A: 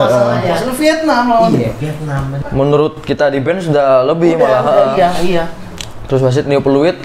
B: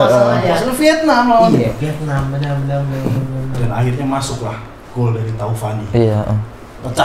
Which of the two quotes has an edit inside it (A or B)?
A